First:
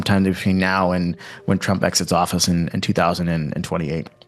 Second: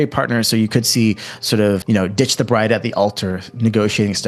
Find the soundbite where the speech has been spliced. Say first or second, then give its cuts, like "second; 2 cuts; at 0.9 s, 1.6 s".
second; 1 cut; at 1.8 s